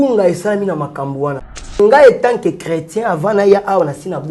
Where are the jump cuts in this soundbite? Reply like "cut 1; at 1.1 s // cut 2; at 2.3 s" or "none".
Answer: cut 1; at 1.8 s